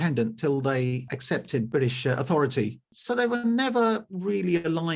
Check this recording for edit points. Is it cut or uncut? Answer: cut